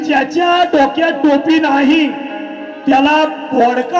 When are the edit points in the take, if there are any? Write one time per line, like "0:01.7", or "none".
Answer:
none